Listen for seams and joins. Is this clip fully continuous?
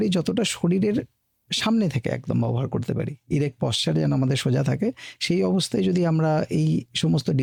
yes; 0 cuts

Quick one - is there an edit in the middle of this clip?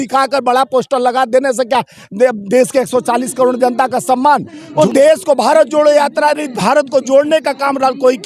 yes; 1 cut; at 4.6 s

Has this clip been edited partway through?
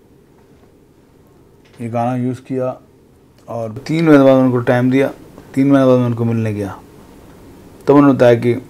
yes; 1 cut; at 3.8 s

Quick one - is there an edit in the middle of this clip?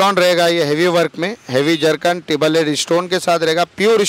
no; 0 cuts

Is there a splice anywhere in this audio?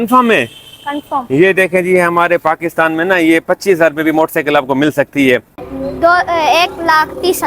yes; 1 cut; at 5.7 s

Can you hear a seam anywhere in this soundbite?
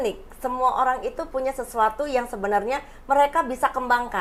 no; 0 cuts

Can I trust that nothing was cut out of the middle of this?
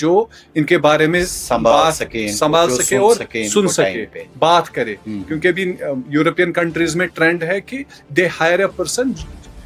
yes; 0 cuts

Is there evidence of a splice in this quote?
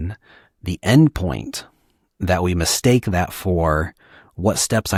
no; 0 cuts

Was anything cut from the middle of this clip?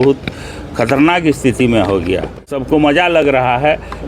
yes; 1 cut; at 2.5 s

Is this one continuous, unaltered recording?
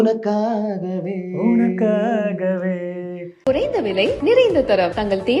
no; 1 cut; at 3.2 s

